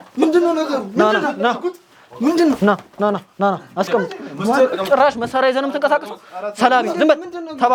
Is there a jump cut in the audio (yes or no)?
no